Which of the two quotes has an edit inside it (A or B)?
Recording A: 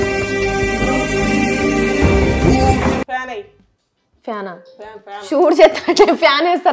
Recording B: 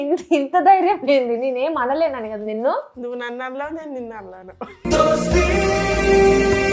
A